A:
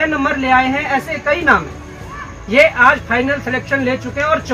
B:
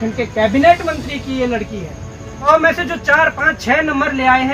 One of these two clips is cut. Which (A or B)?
B